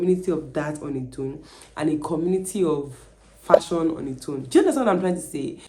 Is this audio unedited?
yes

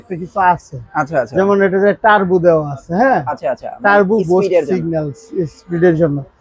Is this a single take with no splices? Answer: yes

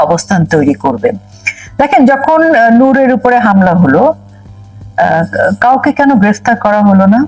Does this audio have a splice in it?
no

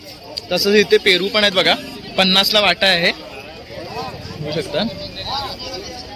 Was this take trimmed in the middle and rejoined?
no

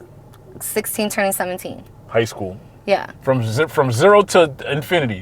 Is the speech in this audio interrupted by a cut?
yes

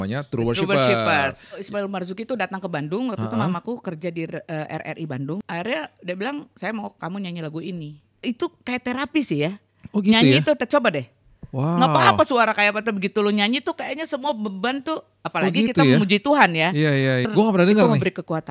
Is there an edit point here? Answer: yes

